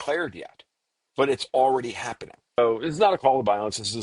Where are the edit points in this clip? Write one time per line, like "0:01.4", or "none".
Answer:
0:02.6